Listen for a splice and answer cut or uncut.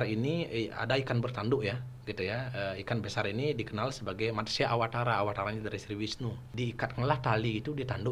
cut